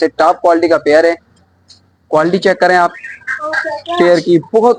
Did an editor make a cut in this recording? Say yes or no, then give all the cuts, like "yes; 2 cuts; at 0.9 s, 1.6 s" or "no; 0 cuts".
no; 0 cuts